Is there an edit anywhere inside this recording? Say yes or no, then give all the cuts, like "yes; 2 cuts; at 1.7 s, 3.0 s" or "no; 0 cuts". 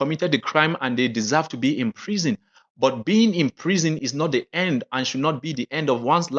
no; 0 cuts